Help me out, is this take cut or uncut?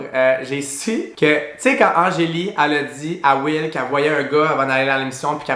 uncut